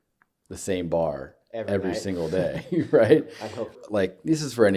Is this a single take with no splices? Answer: no; 1 cut; at 3.8 s

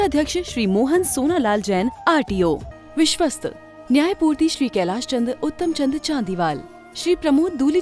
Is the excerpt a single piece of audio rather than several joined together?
no; 1 cut; at 2.7 s

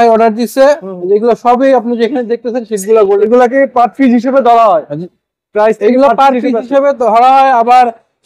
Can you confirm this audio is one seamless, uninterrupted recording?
no; 1 cut; at 3.2 s

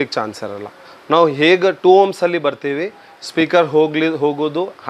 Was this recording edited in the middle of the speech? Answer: no; 0 cuts

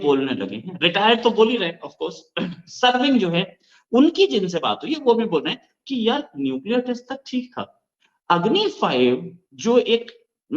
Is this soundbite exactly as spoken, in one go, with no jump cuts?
yes; 0 cuts

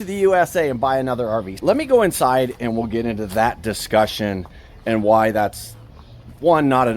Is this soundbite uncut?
no; 1 cut; at 1.5 s

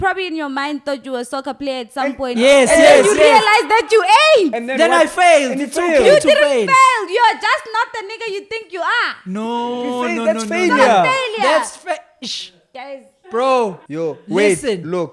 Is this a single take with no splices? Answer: yes; 0 cuts

